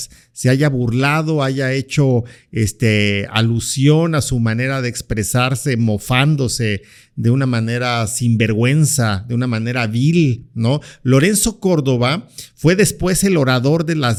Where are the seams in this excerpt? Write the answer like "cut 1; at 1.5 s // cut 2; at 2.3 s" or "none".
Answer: none